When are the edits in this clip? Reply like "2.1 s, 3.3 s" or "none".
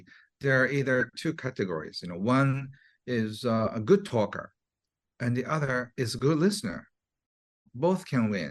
7.6 s